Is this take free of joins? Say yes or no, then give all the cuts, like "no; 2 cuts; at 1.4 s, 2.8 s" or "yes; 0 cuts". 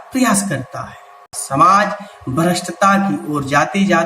no; 1 cut; at 1.4 s